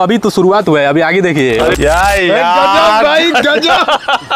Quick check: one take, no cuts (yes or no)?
no